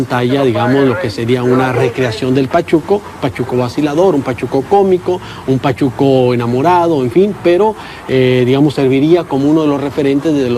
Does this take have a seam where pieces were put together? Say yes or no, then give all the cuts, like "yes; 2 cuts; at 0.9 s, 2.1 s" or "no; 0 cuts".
yes; 1 cut; at 6.3 s